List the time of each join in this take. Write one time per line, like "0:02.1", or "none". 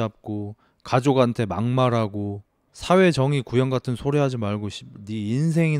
none